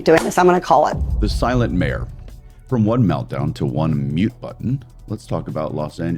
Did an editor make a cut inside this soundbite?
yes; 1 cut; at 1.1 s

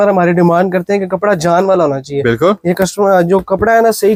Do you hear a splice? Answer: no; 0 cuts

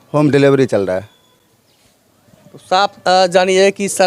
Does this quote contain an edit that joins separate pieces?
no; 0 cuts

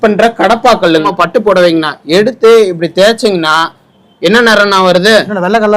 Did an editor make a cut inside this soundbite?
yes; 1 cut; at 1.1 s

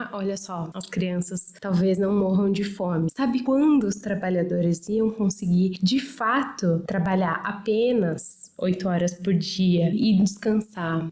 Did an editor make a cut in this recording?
yes; 1 cut; at 3.1 s

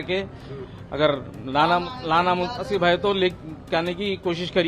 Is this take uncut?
yes; 0 cuts

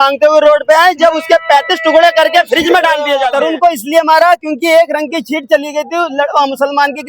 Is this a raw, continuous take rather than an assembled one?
no; 1 cut; at 3.3 s

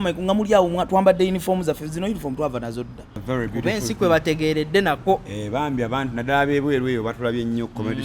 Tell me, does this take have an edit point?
yes; 1 cut; at 3.1 s

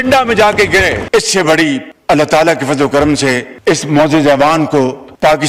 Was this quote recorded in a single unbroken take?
yes; 0 cuts

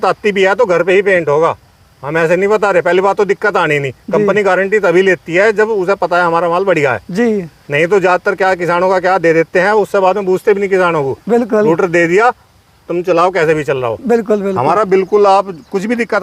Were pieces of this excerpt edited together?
no; 0 cuts

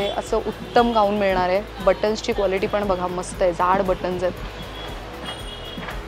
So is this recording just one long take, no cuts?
yes; 0 cuts

